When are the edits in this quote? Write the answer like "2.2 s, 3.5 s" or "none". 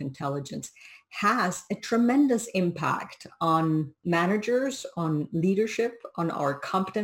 4.0 s